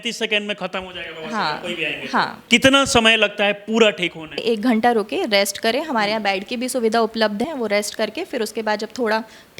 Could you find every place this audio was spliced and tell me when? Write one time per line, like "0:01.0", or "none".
0:02.4
0:04.4
0:07.4